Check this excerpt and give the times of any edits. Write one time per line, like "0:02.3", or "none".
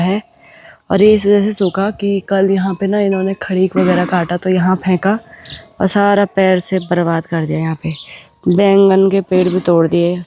none